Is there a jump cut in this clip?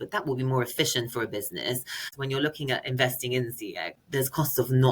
yes; 2 cuts; at 2.1 s, 4.0 s

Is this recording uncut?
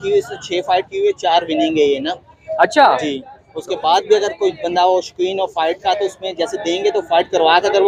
yes; 0 cuts

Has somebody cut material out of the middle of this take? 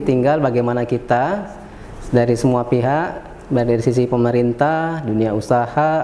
no; 0 cuts

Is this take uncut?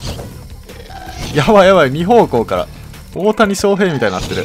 yes; 0 cuts

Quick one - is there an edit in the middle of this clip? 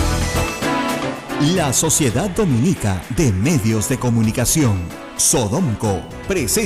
yes; 1 cut; at 1.2 s

